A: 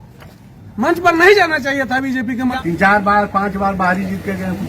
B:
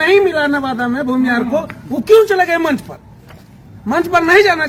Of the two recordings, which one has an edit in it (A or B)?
A